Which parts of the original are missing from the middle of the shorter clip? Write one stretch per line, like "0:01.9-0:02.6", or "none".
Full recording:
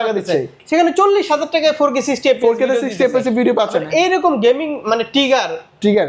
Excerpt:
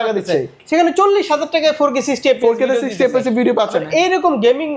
none